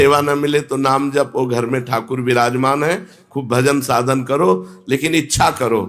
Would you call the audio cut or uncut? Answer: uncut